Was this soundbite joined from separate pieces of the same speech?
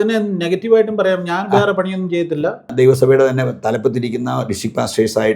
yes; 1 cut; at 2.7 s

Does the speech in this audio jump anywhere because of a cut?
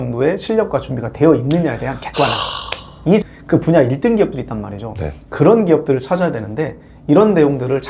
yes; 1 cut; at 3.2 s

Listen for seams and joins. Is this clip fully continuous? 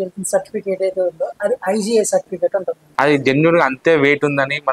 no; 1 cut; at 2.8 s

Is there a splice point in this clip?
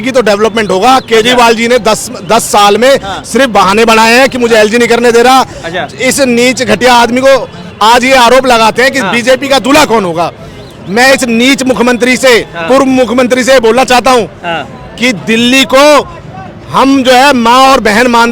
no; 0 cuts

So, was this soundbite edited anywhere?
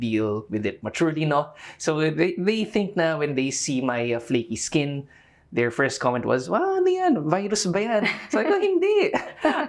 no; 0 cuts

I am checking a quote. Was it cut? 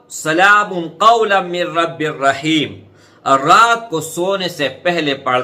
no; 0 cuts

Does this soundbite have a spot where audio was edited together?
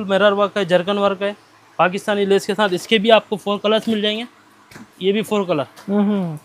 no; 0 cuts

